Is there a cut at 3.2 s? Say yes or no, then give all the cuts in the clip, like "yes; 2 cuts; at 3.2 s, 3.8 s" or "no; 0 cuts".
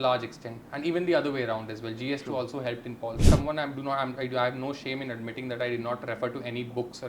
yes; 1 cut; at 3.2 s